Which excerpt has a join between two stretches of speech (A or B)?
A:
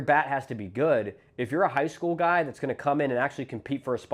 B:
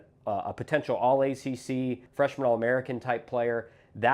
B